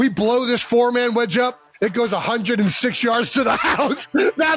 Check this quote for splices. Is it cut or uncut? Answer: uncut